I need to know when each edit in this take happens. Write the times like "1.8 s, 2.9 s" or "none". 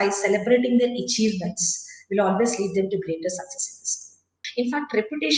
4.4 s